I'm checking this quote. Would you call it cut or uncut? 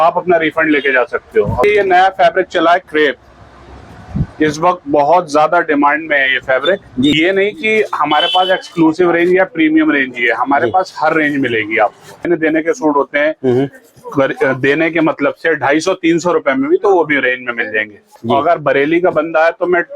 cut